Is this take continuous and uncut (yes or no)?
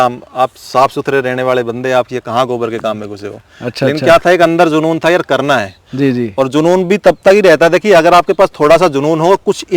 yes